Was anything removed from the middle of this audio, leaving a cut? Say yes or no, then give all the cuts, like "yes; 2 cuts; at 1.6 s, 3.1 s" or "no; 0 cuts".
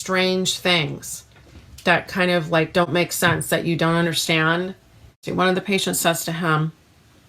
yes; 1 cut; at 5.2 s